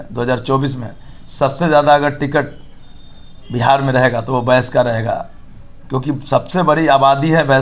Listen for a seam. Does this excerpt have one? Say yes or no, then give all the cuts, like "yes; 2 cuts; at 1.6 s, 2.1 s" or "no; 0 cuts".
no; 0 cuts